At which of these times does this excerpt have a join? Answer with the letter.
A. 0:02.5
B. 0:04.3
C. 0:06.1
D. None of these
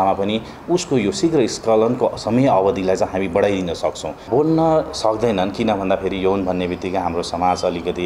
B